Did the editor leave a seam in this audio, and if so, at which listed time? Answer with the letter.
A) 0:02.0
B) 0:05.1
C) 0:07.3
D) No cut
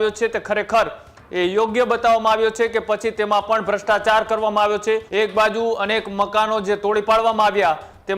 B